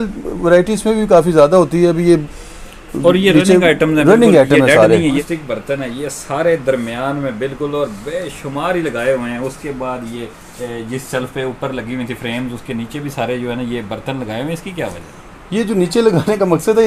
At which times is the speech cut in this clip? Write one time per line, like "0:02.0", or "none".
0:05.2